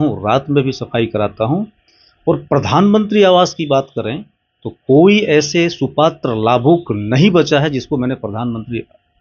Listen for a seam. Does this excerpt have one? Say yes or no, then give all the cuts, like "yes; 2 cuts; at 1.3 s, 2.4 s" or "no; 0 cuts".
no; 0 cuts